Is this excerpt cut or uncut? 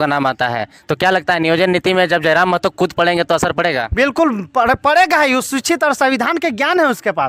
uncut